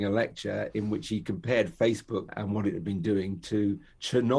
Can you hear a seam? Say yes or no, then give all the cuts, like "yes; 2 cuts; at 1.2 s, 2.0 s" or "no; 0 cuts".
yes; 1 cut; at 2.4 s